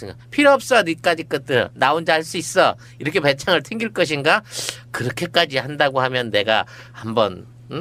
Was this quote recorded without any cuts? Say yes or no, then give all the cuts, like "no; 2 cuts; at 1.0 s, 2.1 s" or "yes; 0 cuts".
yes; 0 cuts